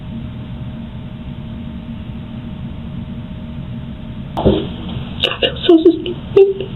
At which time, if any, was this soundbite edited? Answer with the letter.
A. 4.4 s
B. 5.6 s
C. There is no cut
A